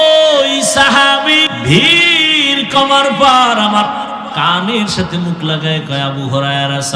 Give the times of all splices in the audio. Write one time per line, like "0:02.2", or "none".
0:01.5